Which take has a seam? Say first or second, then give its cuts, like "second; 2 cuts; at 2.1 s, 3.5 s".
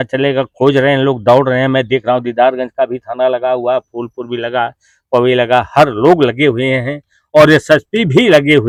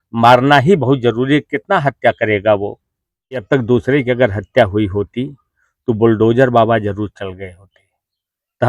second; 1 cut; at 3.4 s